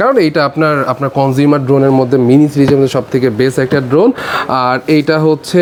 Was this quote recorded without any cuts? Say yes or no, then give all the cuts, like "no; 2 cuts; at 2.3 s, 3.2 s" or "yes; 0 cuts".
yes; 0 cuts